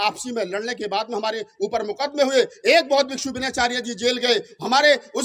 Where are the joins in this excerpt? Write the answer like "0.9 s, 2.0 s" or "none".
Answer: none